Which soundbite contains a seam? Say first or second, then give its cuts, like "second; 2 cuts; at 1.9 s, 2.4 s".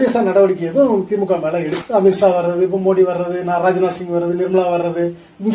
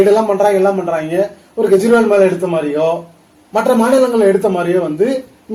first; 1 cut; at 1.8 s